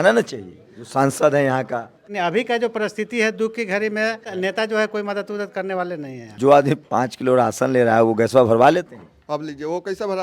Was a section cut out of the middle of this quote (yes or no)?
yes